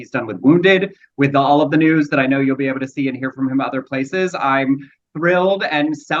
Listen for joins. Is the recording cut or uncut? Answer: uncut